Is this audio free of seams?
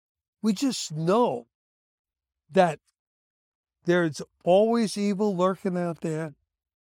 yes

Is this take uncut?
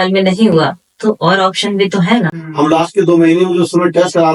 no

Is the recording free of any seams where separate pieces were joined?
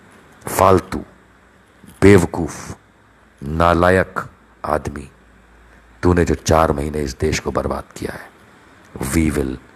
yes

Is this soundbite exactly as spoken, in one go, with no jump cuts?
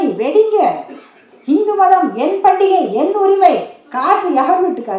yes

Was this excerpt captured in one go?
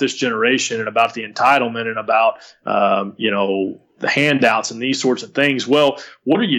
yes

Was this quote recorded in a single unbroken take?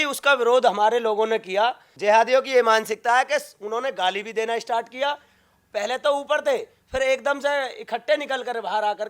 no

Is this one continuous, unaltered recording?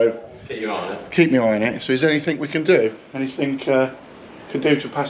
yes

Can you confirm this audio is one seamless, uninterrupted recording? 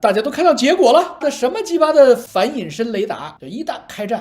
no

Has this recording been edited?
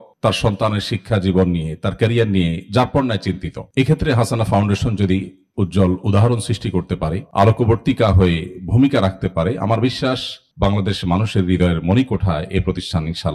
no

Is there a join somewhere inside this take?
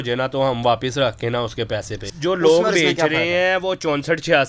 yes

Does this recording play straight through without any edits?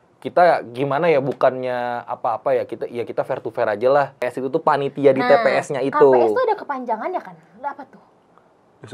no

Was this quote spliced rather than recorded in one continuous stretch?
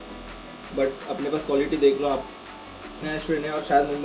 yes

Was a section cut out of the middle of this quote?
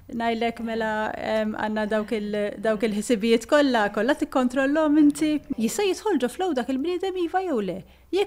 yes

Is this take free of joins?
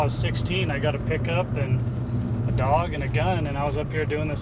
yes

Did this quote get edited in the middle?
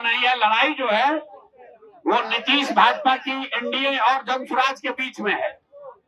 no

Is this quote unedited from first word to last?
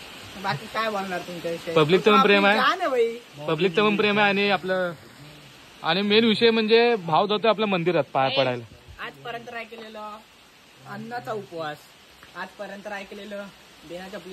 yes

